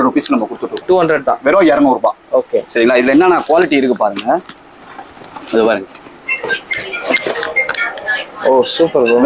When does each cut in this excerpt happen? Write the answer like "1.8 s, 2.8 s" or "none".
none